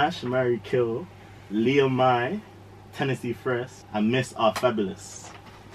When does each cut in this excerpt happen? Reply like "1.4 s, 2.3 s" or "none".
none